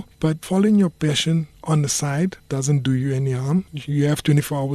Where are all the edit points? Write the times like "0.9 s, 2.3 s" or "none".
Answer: 2.4 s, 3.8 s